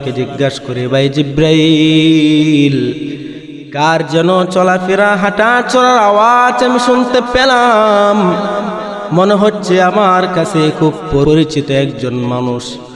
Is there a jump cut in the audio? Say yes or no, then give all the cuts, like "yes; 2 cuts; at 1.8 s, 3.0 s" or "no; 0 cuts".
yes; 1 cut; at 11.2 s